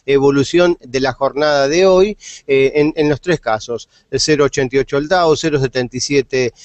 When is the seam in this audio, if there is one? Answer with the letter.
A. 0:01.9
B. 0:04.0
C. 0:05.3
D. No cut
A